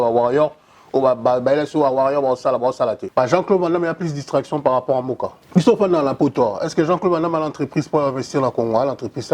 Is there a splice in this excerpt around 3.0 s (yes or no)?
yes